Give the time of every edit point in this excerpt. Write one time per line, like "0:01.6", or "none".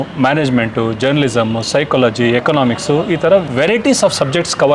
none